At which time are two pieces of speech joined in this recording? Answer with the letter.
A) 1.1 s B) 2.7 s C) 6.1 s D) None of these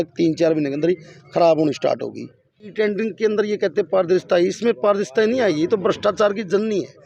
B